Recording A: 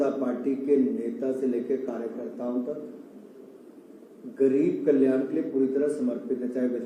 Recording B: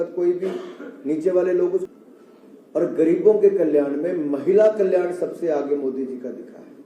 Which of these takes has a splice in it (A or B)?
B